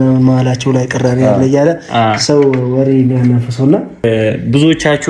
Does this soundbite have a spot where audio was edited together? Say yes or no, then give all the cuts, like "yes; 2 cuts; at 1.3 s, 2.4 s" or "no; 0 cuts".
yes; 1 cut; at 4.0 s